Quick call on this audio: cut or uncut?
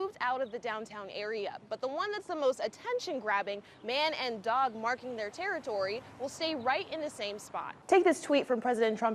cut